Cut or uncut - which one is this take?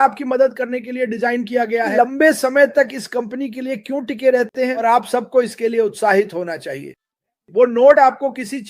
cut